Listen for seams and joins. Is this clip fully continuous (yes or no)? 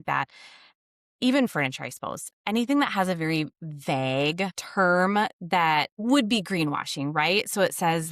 no